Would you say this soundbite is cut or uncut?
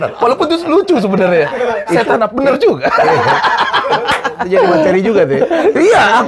uncut